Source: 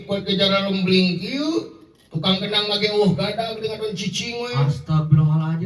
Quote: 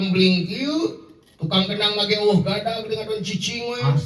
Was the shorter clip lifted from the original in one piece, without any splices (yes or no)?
yes